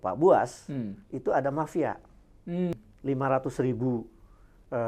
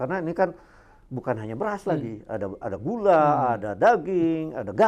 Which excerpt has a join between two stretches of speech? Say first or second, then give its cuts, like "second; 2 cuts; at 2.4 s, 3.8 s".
first; 1 cut; at 2.7 s